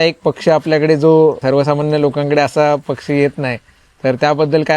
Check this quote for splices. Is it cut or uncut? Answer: cut